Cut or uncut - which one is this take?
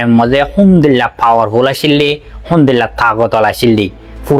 uncut